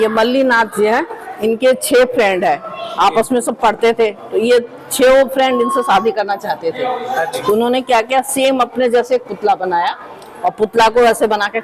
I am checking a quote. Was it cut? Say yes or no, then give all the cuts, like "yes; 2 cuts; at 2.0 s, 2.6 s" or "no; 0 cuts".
no; 0 cuts